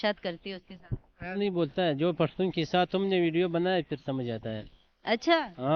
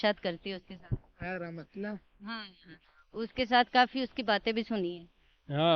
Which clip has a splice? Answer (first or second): first